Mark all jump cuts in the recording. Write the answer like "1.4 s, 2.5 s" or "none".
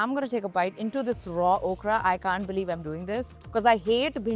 none